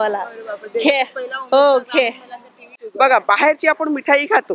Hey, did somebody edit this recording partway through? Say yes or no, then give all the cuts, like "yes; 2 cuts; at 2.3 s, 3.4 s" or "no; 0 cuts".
yes; 1 cut; at 2.8 s